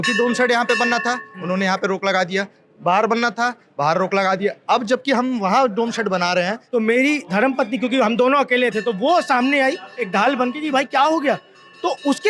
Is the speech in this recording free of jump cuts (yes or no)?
no